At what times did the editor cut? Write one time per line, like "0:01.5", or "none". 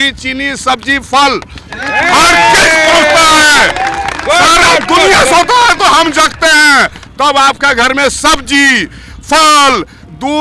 none